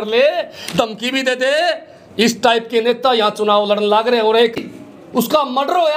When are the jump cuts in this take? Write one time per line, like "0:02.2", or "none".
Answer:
0:04.6